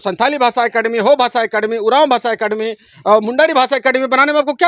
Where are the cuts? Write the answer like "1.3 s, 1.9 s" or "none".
none